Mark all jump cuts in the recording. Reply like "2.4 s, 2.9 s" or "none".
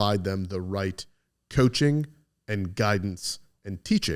none